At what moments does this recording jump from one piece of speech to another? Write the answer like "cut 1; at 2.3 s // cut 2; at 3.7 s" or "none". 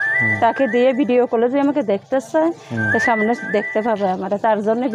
none